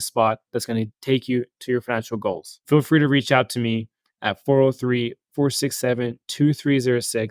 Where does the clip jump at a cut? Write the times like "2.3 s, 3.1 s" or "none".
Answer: 2.5 s